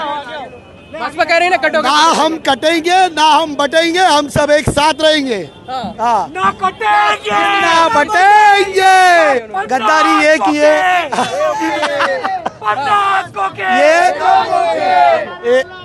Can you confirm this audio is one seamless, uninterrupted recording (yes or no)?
no